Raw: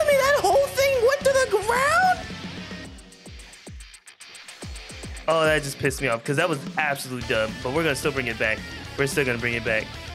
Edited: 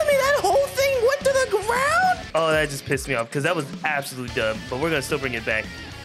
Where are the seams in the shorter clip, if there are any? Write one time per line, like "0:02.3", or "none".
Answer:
0:02.2

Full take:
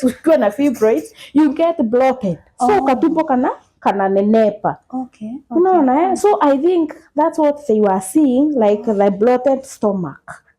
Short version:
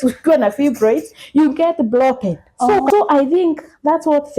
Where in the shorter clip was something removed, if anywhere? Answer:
0:02.9

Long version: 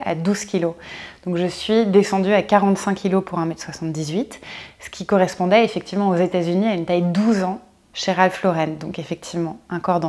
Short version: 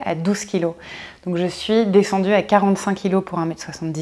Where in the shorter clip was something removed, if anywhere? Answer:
none

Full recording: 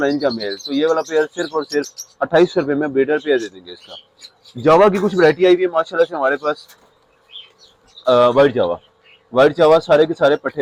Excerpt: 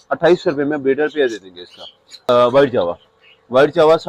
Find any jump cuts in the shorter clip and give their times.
0:02.3

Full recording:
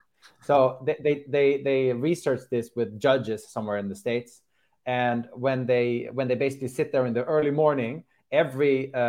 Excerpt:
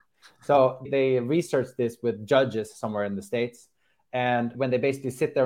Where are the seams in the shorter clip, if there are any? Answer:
0:00.9
0:04.5

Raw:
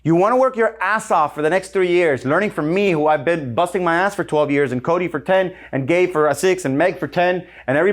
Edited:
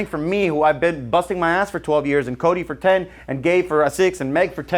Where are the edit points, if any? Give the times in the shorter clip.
none

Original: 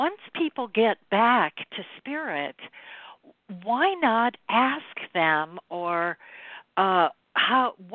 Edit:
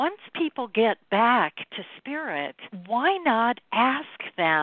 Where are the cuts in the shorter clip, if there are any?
0:02.7

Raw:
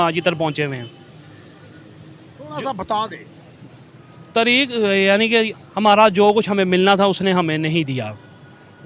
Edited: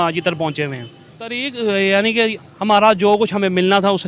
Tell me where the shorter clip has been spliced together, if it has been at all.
0:01.4

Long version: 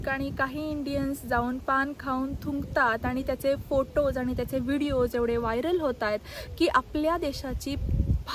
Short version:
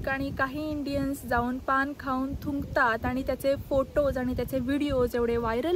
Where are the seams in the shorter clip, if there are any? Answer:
none

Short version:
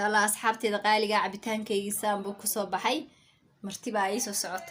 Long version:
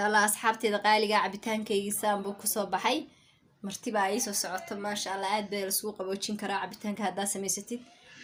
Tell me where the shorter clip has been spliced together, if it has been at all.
none

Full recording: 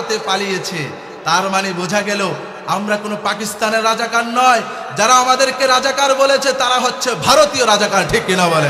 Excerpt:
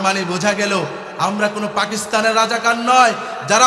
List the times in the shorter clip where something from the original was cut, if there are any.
none

